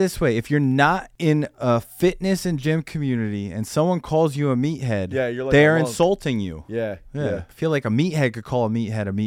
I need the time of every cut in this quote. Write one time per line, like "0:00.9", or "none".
0:01.1
0:07.5